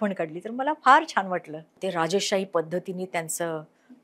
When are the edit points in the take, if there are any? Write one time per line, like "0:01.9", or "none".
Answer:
0:01.7